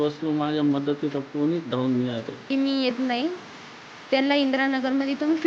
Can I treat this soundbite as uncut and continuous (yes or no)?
no